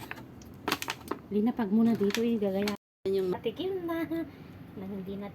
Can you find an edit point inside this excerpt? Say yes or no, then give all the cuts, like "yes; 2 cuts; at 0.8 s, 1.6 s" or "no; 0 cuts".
yes; 1 cut; at 3.3 s